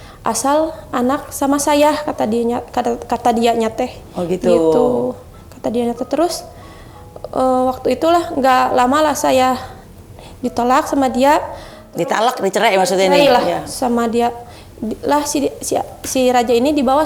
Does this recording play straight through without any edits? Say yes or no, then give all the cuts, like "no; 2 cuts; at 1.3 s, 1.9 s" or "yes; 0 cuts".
yes; 0 cuts